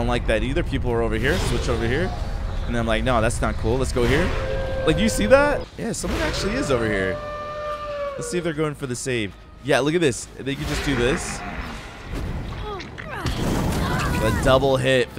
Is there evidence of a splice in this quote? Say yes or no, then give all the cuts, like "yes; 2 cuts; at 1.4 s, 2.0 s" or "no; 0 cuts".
yes; 1 cut; at 5.7 s